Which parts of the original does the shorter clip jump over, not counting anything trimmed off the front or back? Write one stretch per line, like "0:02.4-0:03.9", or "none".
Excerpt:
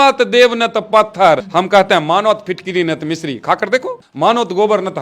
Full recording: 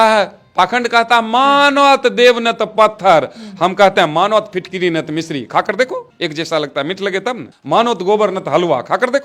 0:03.3-0:03.5
0:06.1-0:07.5